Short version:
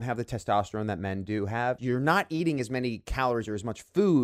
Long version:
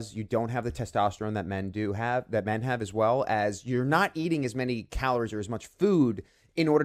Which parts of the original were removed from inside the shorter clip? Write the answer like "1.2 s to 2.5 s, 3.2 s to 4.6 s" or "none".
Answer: 2.3 s to 3.6 s